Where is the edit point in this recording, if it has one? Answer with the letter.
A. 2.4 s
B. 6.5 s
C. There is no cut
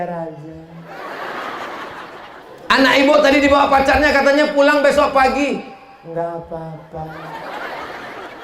A